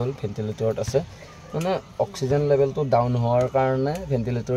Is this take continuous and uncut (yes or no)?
yes